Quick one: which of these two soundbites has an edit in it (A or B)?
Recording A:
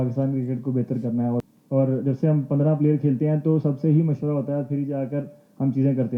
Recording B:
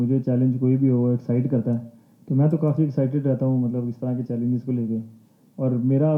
A